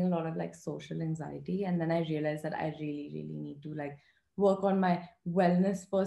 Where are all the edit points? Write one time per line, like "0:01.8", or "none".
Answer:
none